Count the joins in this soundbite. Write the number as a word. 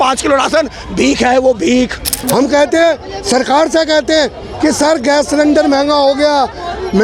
one